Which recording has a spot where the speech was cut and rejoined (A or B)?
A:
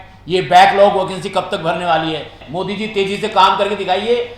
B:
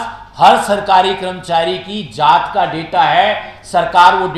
A